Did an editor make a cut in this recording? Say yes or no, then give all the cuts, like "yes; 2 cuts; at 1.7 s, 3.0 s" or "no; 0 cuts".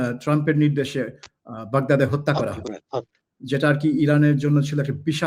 no; 0 cuts